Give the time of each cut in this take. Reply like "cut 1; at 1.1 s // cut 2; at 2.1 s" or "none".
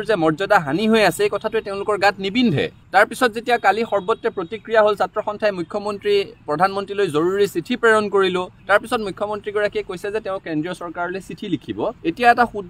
none